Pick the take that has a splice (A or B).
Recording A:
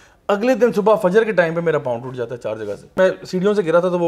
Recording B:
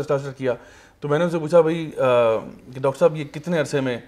A